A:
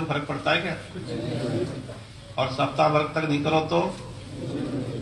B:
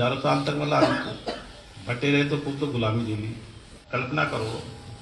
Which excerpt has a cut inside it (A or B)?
B